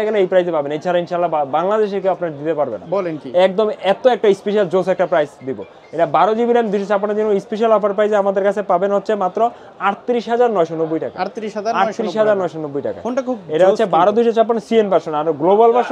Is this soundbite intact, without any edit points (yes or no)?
yes